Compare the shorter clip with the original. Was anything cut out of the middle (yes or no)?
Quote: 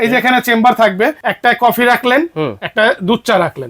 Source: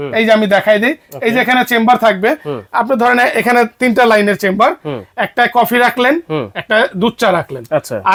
yes